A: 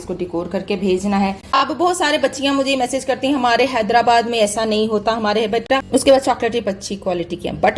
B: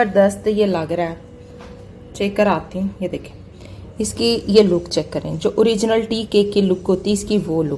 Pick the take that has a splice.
A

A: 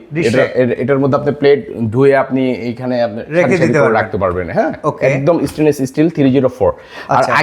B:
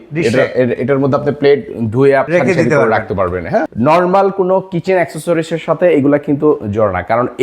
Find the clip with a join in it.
B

